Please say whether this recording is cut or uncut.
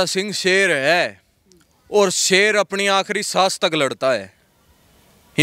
uncut